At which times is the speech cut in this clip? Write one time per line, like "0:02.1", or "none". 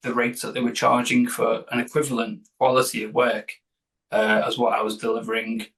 none